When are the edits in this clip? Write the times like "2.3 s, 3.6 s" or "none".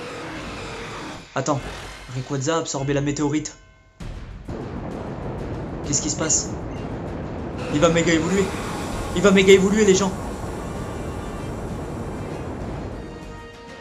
none